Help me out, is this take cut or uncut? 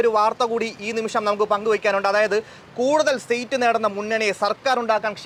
uncut